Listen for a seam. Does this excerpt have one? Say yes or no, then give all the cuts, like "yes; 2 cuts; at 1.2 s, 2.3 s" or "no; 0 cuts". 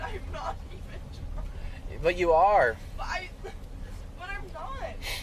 no; 0 cuts